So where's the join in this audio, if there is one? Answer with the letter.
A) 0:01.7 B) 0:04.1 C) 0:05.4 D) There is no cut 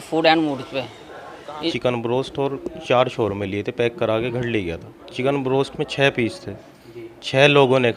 A